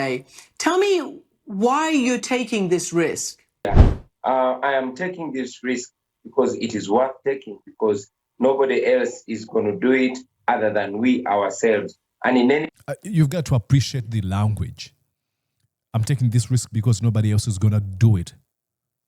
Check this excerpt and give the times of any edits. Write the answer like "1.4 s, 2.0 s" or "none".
3.7 s